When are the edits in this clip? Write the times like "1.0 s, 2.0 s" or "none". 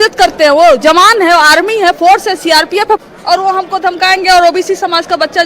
3.0 s